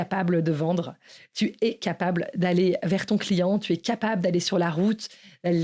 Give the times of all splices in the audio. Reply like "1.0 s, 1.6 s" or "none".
none